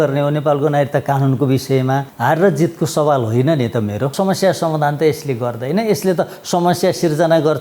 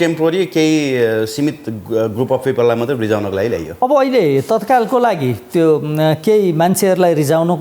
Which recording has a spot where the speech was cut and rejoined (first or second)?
first